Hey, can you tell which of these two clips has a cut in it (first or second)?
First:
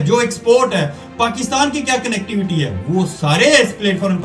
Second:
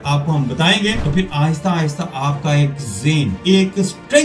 second